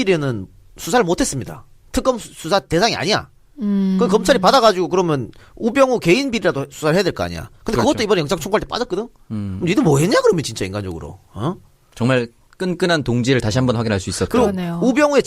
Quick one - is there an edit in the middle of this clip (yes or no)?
yes